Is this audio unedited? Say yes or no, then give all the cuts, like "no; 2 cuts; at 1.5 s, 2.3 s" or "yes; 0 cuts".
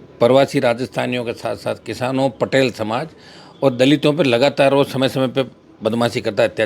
yes; 0 cuts